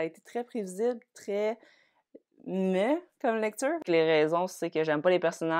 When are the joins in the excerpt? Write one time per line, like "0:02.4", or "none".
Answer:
0:03.8